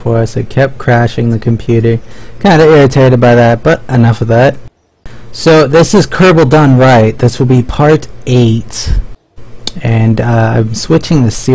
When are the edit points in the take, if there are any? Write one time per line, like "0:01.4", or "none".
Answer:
none